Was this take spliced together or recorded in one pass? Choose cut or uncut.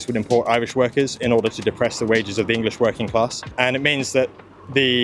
cut